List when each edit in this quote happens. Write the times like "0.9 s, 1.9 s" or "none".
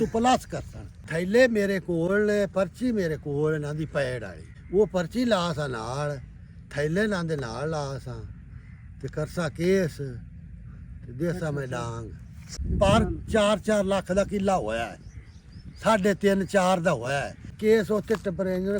1.0 s, 4.5 s, 12.5 s, 17.6 s